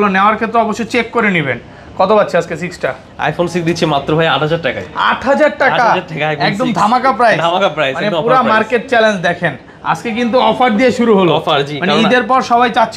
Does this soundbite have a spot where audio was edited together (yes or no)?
no